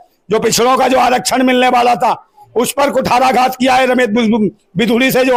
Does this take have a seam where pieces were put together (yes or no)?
no